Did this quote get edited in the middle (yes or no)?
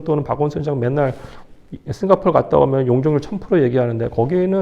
no